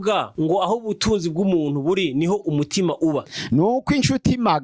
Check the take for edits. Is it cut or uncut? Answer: uncut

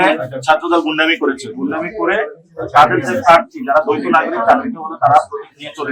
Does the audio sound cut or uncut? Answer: uncut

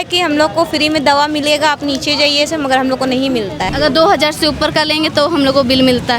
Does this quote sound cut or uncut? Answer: cut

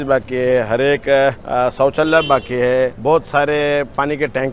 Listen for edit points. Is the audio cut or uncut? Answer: cut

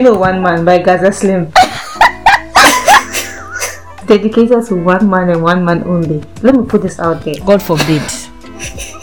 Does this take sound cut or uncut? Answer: cut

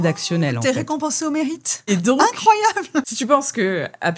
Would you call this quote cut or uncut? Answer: cut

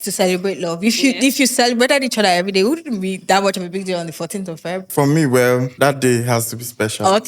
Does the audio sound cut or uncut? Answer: cut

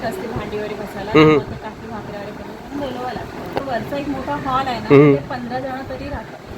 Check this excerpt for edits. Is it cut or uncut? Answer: cut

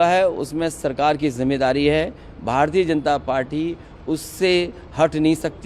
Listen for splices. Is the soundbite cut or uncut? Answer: uncut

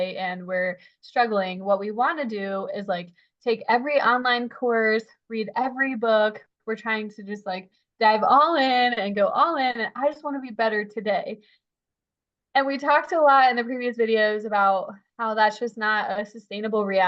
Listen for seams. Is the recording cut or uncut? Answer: uncut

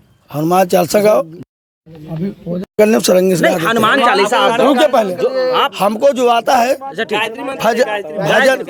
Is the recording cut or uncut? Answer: uncut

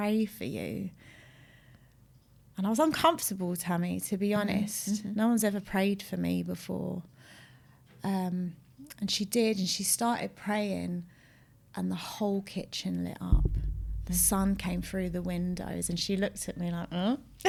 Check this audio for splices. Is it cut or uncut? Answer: uncut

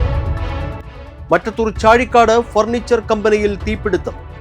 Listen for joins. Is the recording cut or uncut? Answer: cut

